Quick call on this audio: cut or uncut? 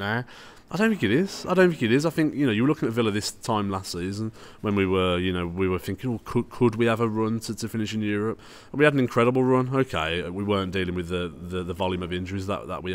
uncut